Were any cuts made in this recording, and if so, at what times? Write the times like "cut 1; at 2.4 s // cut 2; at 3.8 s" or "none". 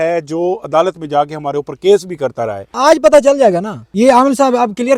cut 1; at 2.7 s // cut 2; at 3.8 s